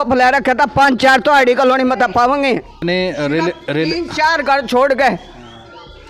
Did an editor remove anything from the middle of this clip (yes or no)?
yes